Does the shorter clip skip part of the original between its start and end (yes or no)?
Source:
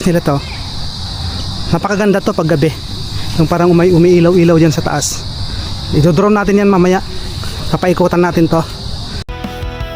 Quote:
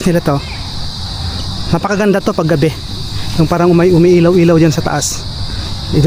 no